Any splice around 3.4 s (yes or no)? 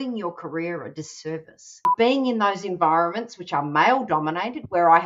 no